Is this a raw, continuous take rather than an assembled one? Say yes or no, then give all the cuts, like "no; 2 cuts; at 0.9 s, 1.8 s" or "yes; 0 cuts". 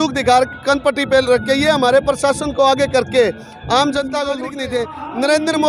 no; 1 cut; at 4.5 s